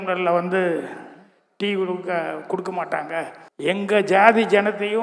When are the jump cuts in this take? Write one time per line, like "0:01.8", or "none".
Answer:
0:03.4